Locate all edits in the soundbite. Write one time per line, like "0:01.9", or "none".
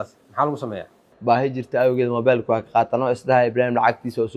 0:01.1